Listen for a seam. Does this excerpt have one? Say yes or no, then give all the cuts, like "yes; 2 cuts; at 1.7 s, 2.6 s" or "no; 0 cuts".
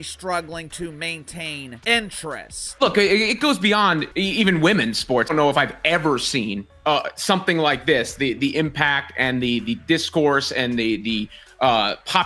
yes; 4 cuts; at 1.8 s, 2.6 s, 4.1 s, 5.3 s